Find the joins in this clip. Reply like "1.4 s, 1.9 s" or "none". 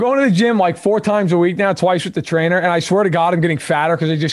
none